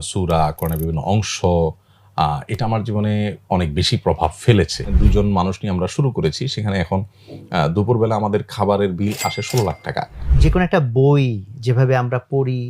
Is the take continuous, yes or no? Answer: no